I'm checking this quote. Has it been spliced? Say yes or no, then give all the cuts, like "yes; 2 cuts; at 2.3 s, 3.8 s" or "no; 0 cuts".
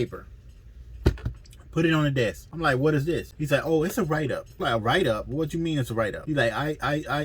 yes; 4 cuts; at 2.5 s, 3.3 s, 4.5 s, 6.2 s